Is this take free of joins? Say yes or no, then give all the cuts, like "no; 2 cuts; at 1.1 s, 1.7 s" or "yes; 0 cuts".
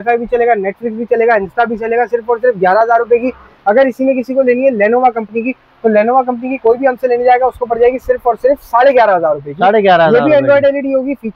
yes; 0 cuts